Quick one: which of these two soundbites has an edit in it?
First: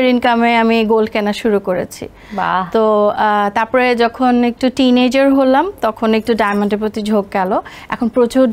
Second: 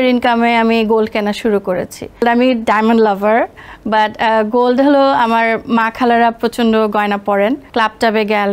second; 2 cuts; at 2.2 s, 7.6 s

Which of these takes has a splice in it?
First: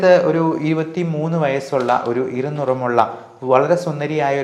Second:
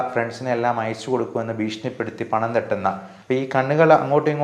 second; 1 cut; at 3.1 s

